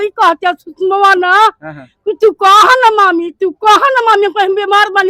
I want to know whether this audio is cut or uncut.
uncut